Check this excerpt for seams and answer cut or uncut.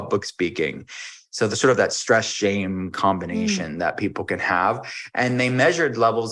uncut